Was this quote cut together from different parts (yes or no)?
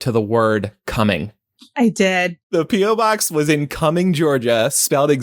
yes